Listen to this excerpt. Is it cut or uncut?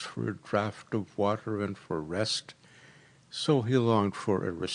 cut